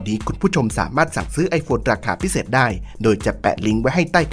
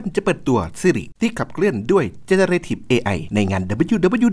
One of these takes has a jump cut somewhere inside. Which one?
second; 2 cuts; at 1.1 s, 3.2 s

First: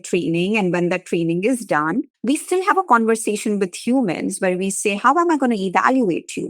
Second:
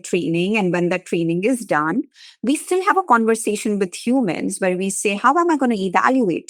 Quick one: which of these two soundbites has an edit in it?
first; 1 cut; at 2.1 s

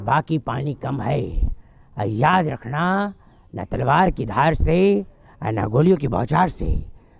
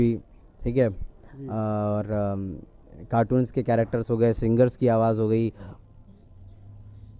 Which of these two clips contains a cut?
second; 1 cut; at 5.6 s

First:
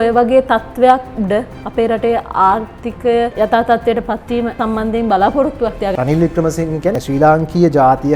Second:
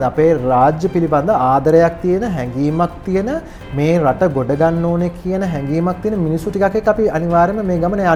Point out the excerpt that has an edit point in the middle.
first; 4 cuts; at 3.3 s, 4.5 s, 5.9 s, 7.0 s

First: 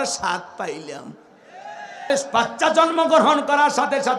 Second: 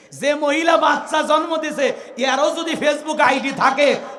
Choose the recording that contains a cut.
first; 1 cut; at 2.1 s

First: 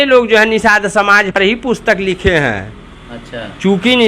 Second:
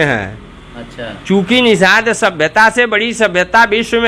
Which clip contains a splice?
first; 1 cut; at 1.4 s

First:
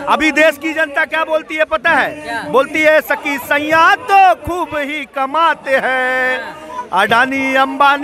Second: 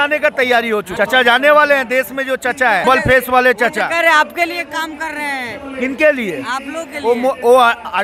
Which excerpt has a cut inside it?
second; 2 cuts; at 0.9 s, 2.8 s

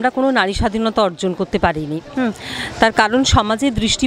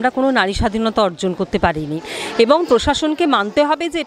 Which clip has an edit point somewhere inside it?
second; 1 cut; at 2.0 s

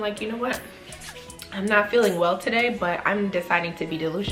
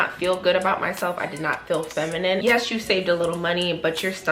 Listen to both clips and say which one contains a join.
second; 1 cut; at 2.4 s

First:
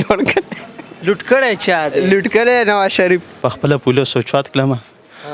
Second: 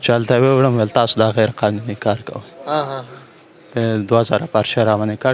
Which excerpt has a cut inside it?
first; 1 cut; at 3.3 s

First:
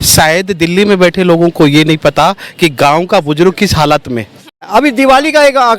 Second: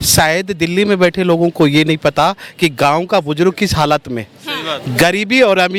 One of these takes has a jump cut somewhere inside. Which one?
first; 1 cut; at 4.7 s

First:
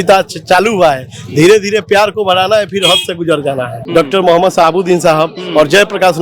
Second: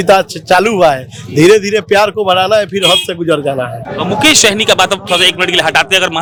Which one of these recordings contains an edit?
first; 1 cut; at 3.7 s

